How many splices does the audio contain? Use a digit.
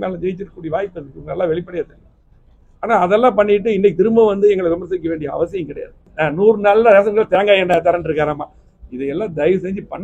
1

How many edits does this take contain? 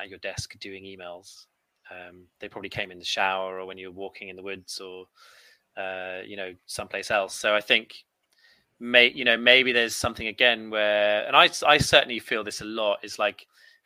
0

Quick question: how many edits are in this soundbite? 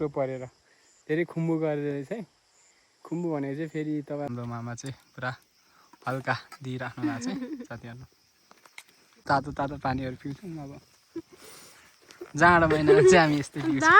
2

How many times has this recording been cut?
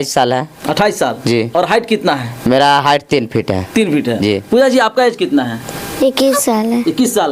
0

